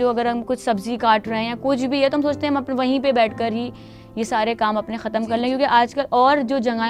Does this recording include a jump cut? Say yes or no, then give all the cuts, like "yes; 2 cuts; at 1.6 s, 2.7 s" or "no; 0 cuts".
no; 0 cuts